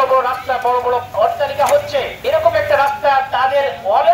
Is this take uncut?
no; 2 cuts; at 1.1 s, 2.1 s

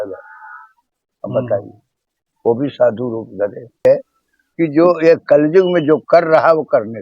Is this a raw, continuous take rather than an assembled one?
no; 1 cut; at 3.8 s

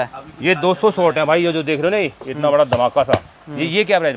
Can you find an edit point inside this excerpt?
no; 0 cuts

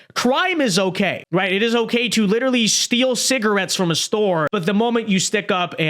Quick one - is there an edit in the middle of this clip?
yes; 2 cuts; at 1.2 s, 4.5 s

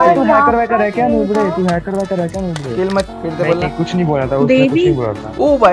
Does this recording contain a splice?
yes; 1 cut; at 3.1 s

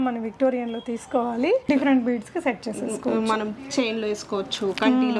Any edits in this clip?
yes; 1 cut; at 1.7 s

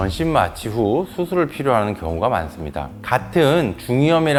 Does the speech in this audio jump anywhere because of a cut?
no; 0 cuts

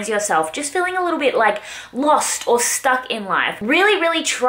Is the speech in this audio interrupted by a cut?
yes; 1 cut; at 3.5 s

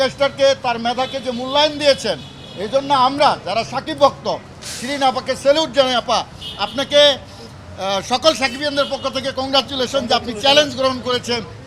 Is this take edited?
no; 0 cuts

